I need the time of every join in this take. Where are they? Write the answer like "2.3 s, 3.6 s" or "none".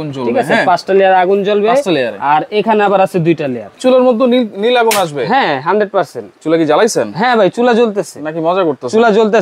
3.8 s